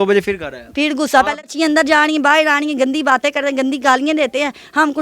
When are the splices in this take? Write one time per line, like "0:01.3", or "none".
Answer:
0:01.5